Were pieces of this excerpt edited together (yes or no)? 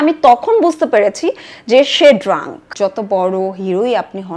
yes